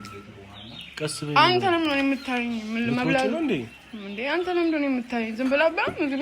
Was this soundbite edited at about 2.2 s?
no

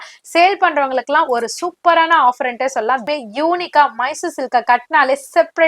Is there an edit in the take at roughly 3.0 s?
yes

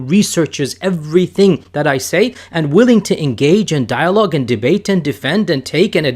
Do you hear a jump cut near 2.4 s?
yes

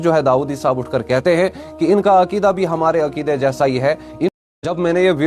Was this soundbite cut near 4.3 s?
yes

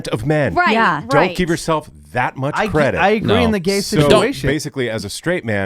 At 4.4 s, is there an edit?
yes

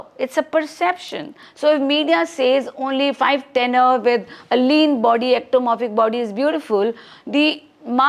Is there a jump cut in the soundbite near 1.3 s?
no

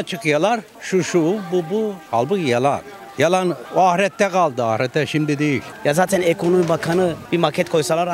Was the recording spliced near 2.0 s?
no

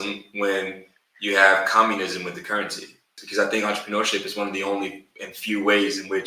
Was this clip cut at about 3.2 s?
yes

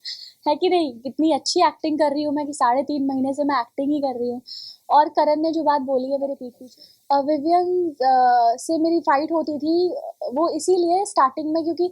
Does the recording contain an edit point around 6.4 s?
yes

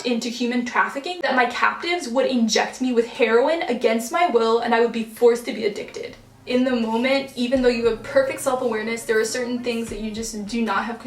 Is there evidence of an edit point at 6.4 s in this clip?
yes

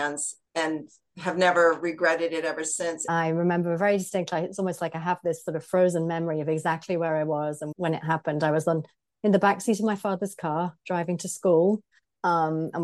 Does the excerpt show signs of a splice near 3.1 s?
yes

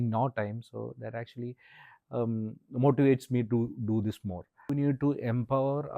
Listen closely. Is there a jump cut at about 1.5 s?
no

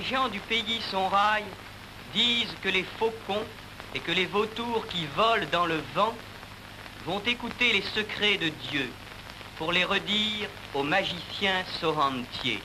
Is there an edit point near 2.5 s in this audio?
yes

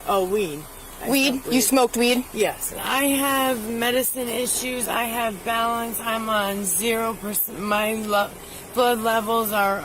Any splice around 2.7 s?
yes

